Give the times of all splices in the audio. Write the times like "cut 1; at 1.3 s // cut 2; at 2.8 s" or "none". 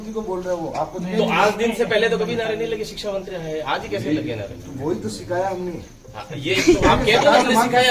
none